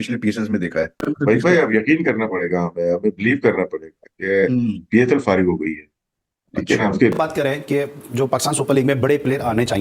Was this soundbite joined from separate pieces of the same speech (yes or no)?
yes